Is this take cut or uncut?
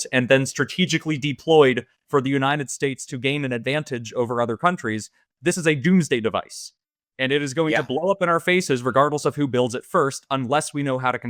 uncut